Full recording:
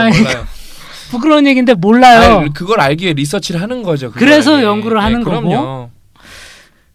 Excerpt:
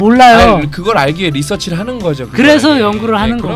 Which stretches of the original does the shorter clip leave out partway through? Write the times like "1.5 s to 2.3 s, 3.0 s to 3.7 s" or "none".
none